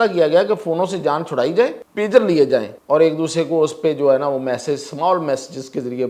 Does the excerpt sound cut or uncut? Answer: cut